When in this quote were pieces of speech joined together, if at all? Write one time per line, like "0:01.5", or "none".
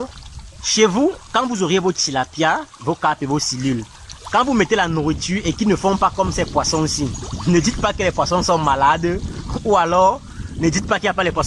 none